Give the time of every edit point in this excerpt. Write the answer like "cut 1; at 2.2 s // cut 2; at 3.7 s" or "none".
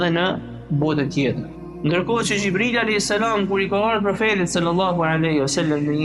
cut 1; at 1.5 s